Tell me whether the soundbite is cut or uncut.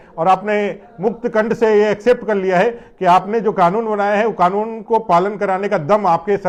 uncut